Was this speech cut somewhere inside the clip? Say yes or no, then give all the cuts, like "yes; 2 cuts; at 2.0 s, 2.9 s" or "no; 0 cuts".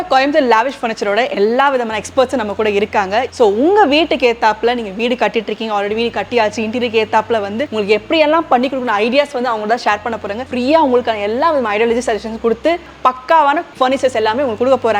yes; 3 cuts; at 3.3 s, 10.4 s, 12.8 s